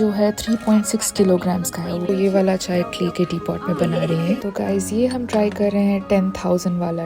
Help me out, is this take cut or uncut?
cut